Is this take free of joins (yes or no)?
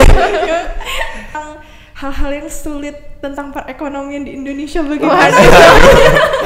no